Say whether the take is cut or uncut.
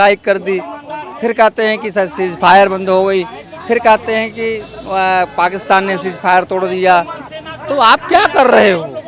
uncut